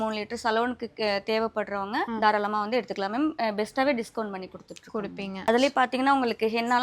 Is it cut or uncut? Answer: cut